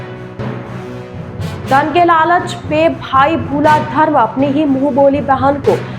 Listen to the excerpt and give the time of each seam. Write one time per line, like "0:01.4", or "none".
0:01.2